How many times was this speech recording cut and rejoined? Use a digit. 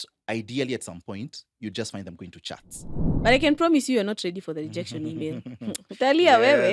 1